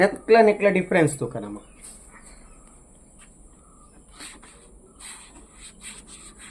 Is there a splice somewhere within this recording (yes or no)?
no